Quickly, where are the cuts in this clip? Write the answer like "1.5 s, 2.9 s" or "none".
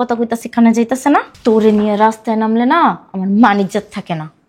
1.3 s